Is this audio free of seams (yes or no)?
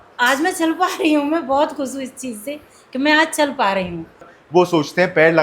no